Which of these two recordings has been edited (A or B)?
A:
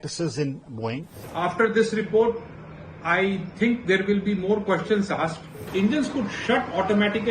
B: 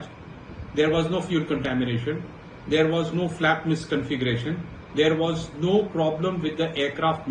A